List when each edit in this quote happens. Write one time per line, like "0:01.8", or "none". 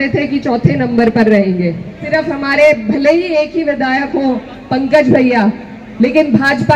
0:02.0